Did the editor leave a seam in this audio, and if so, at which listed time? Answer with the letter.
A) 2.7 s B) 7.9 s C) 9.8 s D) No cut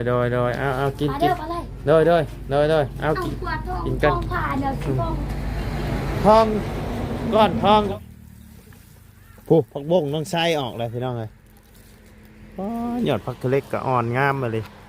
B